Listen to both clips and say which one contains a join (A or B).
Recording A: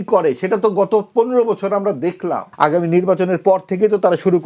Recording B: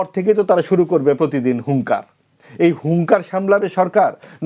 A